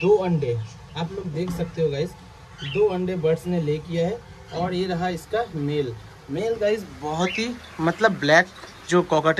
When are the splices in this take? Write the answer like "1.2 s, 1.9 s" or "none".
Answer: none